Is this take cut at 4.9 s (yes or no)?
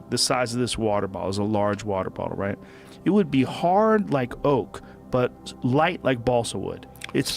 no